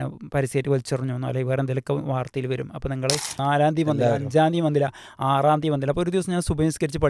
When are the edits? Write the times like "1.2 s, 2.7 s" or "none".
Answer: 3.3 s